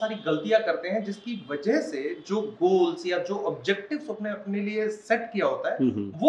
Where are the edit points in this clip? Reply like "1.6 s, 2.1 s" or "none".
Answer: none